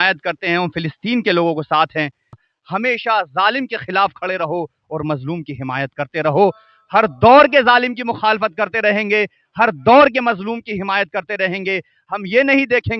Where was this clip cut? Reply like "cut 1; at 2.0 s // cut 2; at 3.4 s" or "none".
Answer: cut 1; at 2.4 s